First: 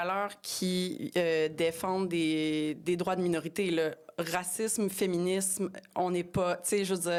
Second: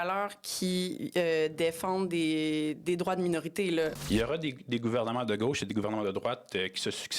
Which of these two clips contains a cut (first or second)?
second